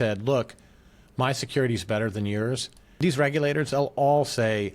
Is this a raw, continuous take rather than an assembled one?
no; 1 cut; at 3.0 s

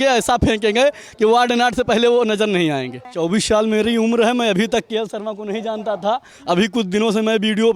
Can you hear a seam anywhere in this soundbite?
yes; 1 cut; at 3.0 s

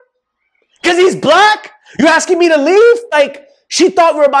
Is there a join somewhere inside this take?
yes; 1 cut; at 3.1 s

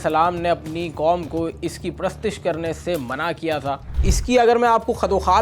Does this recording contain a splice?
yes; 1 cut; at 4.0 s

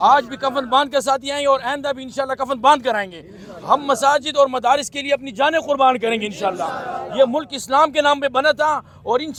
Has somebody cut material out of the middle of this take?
no; 0 cuts

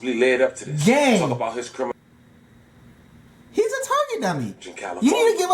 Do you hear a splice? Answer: yes; 1 cut; at 1.9 s

